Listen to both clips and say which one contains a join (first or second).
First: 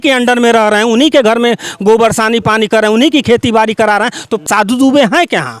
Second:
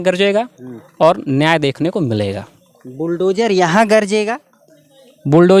first